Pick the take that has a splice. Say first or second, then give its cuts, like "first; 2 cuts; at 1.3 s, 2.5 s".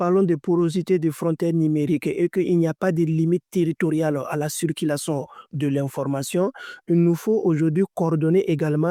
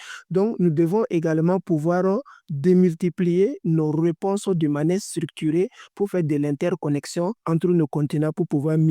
second; 1 cut; at 7.4 s